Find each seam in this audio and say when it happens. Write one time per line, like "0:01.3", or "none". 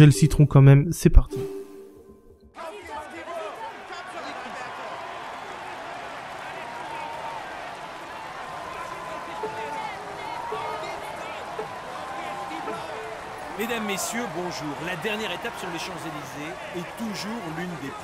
0:08.3